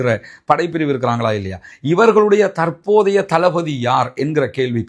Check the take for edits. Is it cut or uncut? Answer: uncut